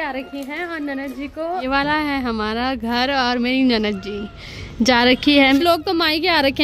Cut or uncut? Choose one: cut